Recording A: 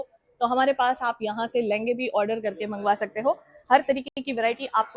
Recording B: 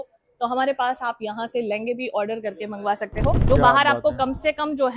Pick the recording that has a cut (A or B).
B